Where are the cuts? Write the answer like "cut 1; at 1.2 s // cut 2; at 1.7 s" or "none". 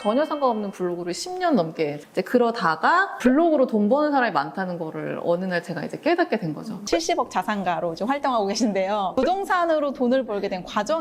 cut 1; at 2.0 s // cut 2; at 3.1 s // cut 3; at 6.8 s // cut 4; at 9.1 s

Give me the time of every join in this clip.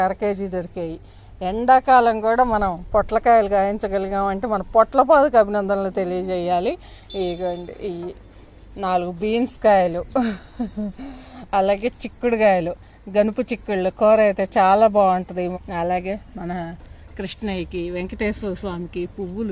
cut 1; at 15.5 s

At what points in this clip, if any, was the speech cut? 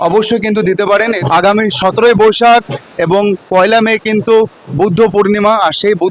cut 1; at 1.2 s

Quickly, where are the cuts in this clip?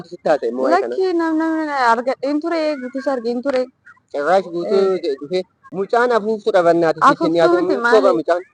cut 1; at 5.6 s

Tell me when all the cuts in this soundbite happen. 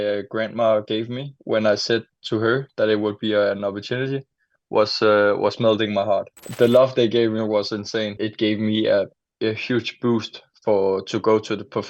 cut 1; at 6.4 s // cut 2; at 8.2 s

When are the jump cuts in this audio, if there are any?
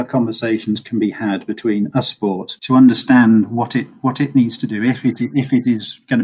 none

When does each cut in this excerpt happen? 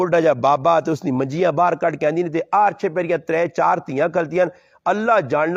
none

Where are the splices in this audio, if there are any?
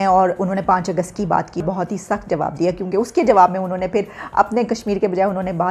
cut 1; at 1.6 s

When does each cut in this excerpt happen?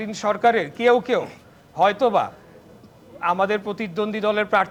none

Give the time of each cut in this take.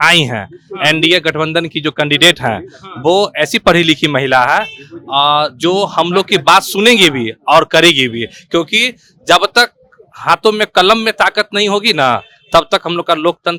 none

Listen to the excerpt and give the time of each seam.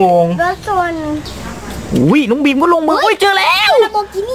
cut 1; at 1.2 s

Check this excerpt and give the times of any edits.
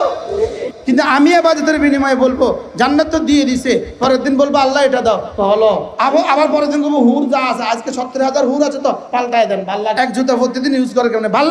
cut 1; at 5.9 s // cut 2; at 10.0 s

